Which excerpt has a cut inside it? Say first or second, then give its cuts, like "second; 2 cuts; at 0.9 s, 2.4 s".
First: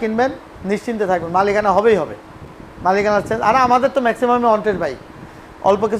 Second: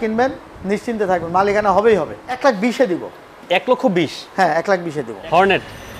second; 2 cuts; at 2.4 s, 5.1 s